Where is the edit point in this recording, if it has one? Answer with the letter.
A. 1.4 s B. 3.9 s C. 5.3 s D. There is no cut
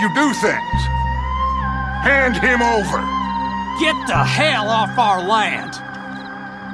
A